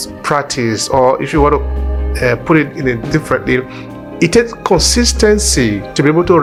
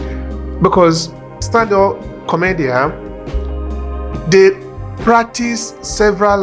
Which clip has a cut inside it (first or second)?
second